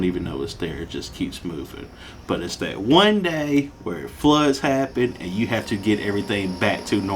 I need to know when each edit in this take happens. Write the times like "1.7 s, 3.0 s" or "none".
none